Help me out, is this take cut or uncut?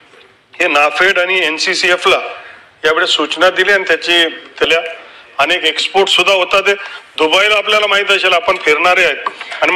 cut